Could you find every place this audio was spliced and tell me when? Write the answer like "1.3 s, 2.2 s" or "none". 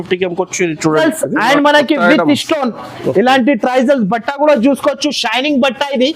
1.0 s

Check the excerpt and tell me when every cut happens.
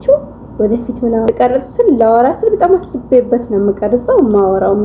1.2 s

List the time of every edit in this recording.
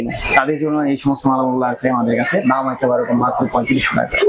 none

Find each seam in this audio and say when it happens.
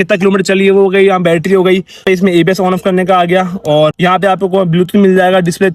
2.0 s, 4.0 s

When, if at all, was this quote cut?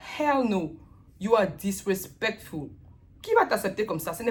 none

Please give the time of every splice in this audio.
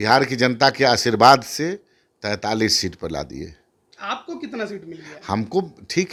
none

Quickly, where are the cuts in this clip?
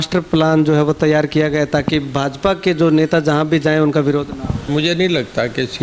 4.7 s

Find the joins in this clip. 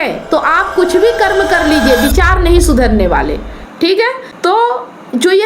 4.2 s

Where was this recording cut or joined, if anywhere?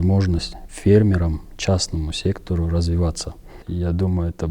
3.5 s

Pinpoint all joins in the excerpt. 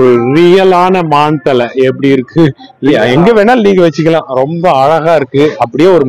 2.9 s

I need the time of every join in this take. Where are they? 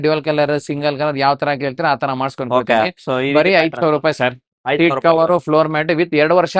none

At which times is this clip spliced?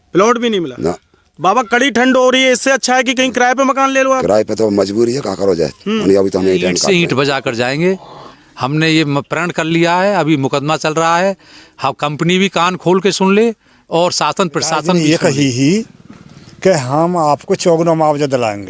6.8 s, 15.0 s

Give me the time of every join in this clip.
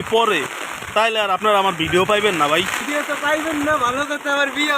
2.8 s

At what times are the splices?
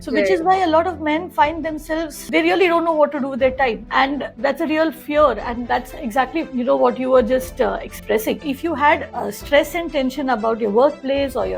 2.2 s, 8.4 s

